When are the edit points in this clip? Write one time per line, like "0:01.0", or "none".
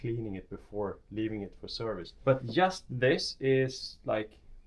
0:02.1

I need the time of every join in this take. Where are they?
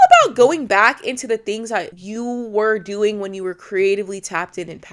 0:02.0

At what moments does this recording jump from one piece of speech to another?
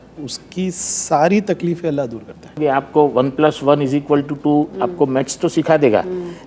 0:02.6

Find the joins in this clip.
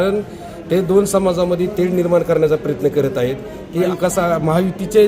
0:03.9

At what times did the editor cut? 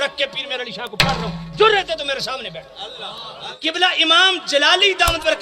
0:03.3

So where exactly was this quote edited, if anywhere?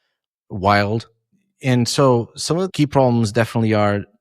0:02.7

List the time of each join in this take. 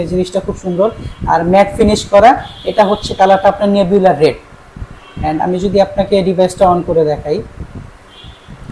none

